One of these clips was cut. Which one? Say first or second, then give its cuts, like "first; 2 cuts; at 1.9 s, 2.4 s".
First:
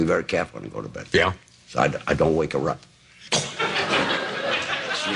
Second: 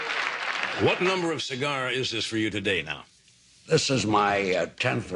second; 1 cut; at 2.1 s